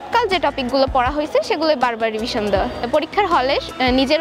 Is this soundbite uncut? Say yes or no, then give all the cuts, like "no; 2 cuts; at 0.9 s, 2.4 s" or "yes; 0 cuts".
no; 1 cut; at 2.9 s